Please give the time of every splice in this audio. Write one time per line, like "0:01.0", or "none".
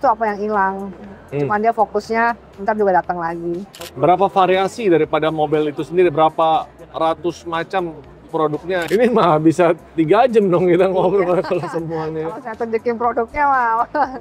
0:03.7
0:08.9